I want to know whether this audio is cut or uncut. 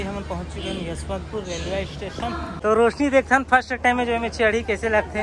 cut